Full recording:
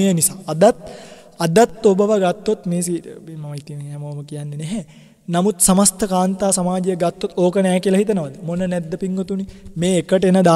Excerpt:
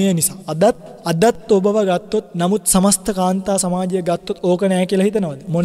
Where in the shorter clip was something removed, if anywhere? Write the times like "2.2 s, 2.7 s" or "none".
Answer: 0.9 s, 2.3 s